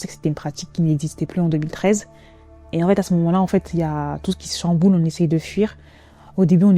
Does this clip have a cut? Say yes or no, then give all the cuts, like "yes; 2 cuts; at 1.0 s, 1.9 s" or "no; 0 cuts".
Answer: no; 0 cuts